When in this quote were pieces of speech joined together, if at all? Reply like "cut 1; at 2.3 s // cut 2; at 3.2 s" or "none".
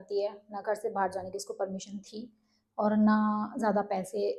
none